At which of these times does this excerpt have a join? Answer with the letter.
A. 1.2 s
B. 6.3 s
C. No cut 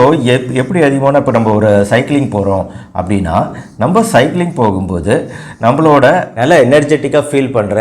B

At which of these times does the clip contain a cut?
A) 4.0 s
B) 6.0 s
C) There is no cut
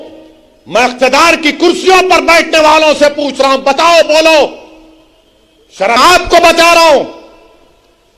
B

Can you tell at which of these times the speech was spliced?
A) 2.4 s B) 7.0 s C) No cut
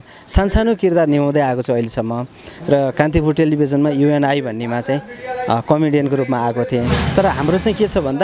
B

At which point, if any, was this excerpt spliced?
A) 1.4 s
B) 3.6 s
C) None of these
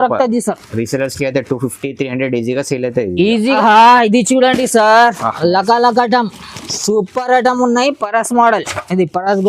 B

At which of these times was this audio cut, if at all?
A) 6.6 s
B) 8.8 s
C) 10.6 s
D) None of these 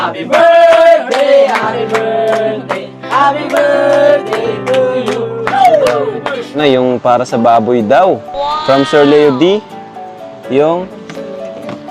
A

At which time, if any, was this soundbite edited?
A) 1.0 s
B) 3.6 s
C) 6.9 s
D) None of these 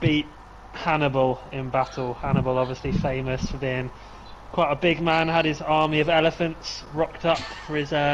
D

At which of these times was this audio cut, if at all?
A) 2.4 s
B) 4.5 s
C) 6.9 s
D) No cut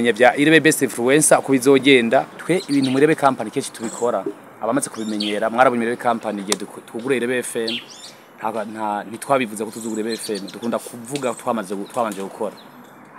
A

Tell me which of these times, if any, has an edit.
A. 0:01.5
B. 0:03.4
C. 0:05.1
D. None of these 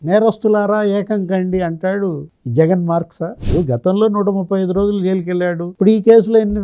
B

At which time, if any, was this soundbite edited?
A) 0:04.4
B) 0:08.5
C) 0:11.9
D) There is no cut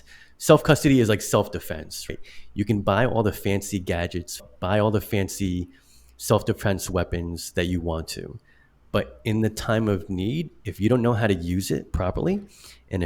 A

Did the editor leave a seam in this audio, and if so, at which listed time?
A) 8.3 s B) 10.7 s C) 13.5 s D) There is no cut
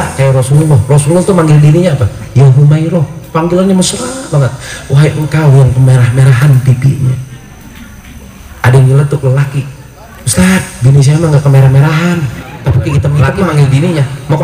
C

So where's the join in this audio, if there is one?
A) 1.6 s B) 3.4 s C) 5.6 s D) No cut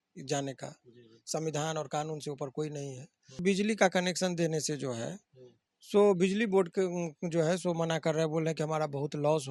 B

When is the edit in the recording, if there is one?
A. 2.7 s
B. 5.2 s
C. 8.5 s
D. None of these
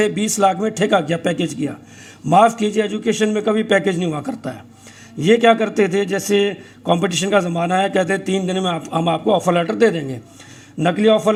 D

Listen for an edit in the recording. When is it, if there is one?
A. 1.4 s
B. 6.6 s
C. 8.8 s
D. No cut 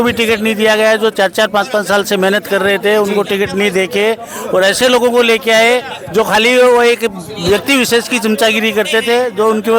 D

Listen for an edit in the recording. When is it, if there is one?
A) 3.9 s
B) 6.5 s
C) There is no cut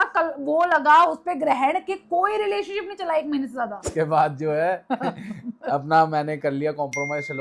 A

